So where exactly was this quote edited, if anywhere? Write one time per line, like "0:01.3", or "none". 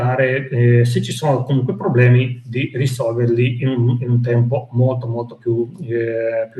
none